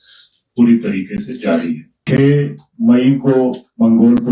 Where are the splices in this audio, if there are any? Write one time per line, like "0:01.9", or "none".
0:01.9